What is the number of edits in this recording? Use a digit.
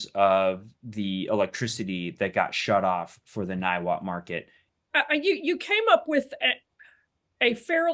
1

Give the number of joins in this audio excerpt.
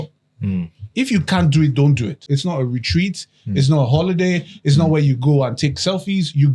1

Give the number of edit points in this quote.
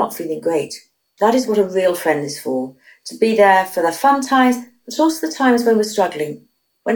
1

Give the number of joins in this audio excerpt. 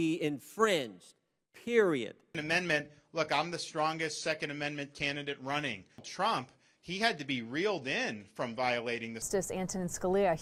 0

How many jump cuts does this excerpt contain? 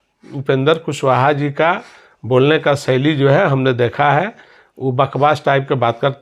0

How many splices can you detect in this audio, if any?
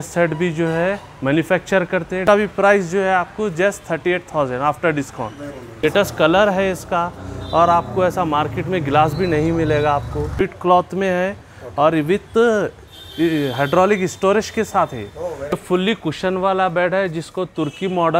4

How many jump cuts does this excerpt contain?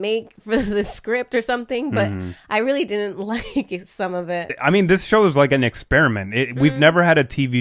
1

